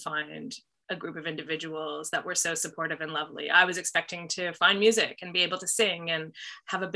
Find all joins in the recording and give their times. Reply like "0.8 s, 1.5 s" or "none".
none